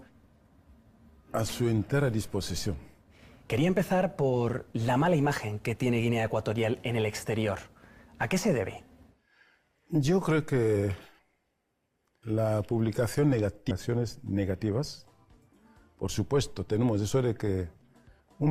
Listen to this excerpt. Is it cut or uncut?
uncut